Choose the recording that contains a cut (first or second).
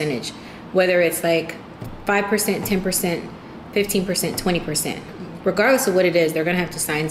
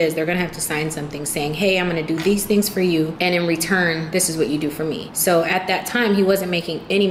second